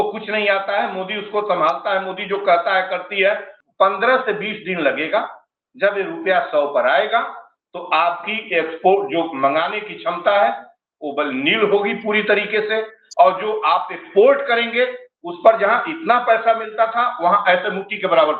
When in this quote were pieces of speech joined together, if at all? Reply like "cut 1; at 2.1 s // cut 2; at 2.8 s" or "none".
cut 1; at 3.6 s